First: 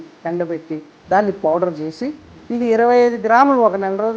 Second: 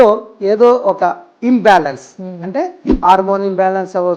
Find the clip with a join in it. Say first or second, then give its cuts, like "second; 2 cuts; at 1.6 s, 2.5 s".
first; 1 cut; at 2.2 s